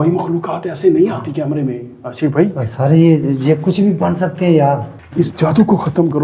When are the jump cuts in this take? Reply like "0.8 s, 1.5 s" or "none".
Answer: 5.0 s